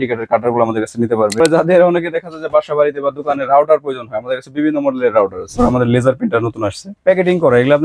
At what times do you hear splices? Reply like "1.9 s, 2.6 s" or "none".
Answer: 1.4 s, 5.5 s, 6.9 s